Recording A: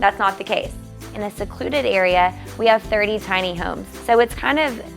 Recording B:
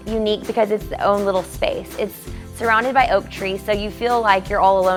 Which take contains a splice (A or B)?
A